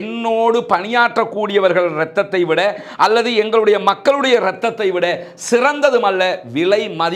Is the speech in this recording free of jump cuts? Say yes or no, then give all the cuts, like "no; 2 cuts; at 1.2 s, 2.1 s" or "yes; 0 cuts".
yes; 0 cuts